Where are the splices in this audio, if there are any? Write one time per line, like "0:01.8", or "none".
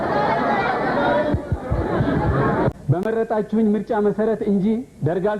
0:02.8